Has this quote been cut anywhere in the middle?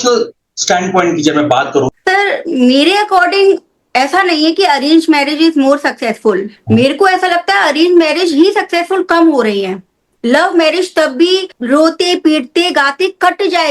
yes; 1 cut; at 1.9 s

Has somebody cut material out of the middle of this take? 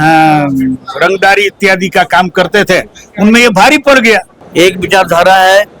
yes; 1 cut; at 4.3 s

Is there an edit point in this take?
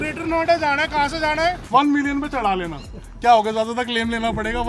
yes; 1 cut; at 1.6 s

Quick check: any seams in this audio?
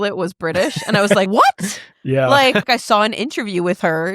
yes; 2 cuts; at 1.3 s, 2.7 s

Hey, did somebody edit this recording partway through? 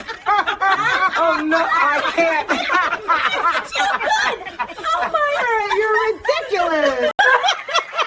yes; 1 cut; at 7.1 s

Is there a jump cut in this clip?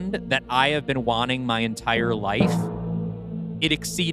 no; 0 cuts

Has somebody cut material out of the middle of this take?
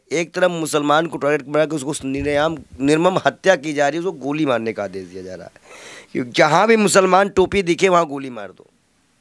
no; 0 cuts

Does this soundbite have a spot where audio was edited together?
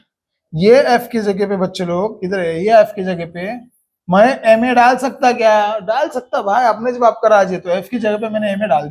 no; 0 cuts

